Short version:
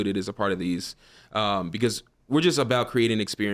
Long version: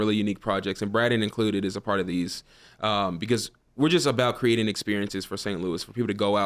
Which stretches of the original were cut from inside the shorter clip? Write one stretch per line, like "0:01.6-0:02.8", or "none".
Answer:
none